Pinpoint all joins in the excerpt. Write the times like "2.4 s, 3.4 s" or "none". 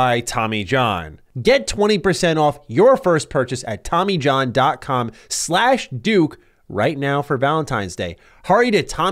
1.2 s